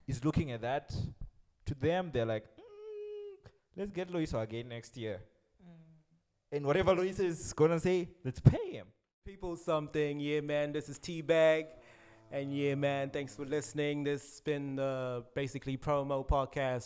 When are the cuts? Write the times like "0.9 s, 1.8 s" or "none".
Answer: 9.5 s